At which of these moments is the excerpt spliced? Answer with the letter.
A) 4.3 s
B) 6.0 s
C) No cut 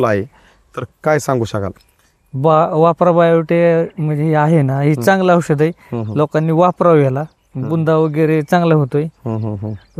C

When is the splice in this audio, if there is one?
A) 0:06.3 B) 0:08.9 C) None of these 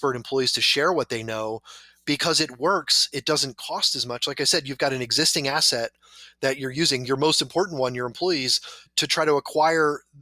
B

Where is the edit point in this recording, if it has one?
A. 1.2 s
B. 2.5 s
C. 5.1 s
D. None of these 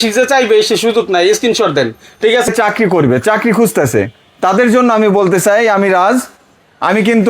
B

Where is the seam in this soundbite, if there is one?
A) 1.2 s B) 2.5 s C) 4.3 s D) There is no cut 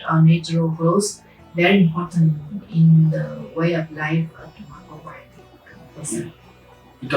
D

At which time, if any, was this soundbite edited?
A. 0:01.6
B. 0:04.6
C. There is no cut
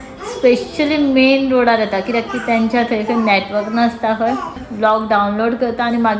B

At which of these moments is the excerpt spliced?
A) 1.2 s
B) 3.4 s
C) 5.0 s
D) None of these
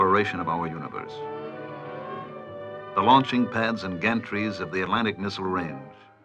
C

